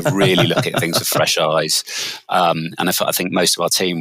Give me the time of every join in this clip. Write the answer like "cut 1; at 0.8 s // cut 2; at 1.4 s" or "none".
none